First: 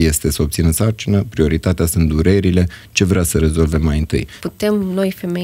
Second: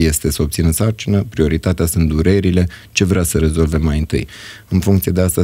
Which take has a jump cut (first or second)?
first